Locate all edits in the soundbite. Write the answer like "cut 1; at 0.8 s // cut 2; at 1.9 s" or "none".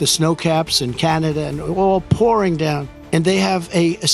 cut 1; at 2.9 s